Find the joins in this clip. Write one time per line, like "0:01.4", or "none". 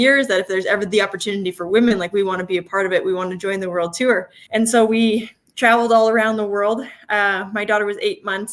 none